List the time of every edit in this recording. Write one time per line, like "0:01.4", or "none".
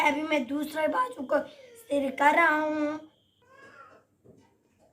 0:03.1

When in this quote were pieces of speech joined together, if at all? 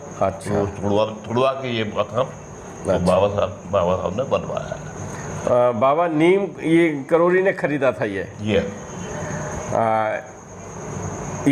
none

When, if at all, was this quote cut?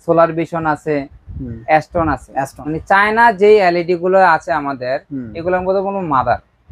0:02.6

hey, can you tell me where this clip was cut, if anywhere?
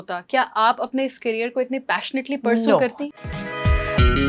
0:03.0

